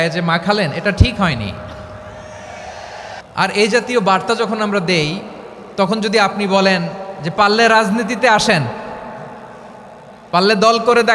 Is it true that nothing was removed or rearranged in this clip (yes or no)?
no